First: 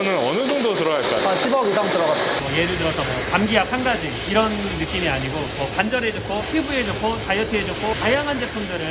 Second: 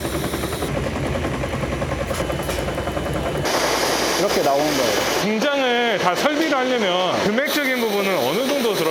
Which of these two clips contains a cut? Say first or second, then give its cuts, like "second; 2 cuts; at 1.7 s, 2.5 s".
first; 2 cuts; at 2.4 s, 7.9 s